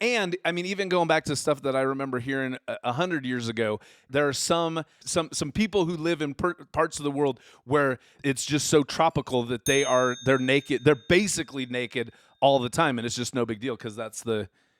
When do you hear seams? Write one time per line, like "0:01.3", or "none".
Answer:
0:04.1
0:05.0
0:08.1